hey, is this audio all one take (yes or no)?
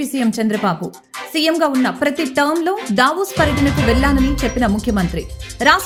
yes